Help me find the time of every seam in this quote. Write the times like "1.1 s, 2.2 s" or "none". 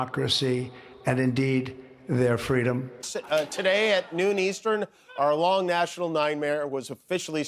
3.1 s